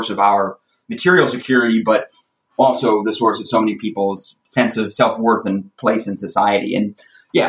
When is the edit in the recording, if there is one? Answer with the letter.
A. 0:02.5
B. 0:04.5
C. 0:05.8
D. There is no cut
D